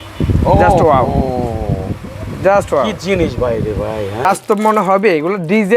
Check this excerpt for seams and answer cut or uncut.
cut